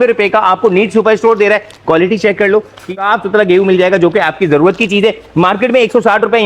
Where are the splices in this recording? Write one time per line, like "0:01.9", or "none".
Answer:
0:02.9